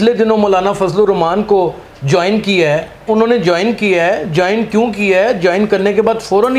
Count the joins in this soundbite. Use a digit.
1